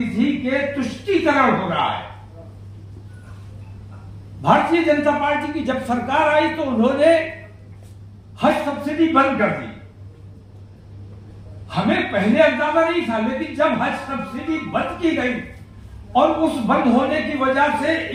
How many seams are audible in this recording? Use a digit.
0